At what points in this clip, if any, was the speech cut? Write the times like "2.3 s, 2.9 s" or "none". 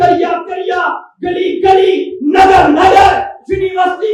none